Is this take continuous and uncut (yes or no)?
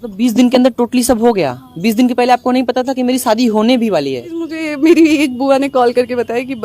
no